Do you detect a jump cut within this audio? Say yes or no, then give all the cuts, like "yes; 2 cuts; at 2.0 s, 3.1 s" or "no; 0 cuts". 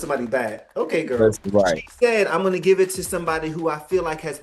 yes; 1 cut; at 1.4 s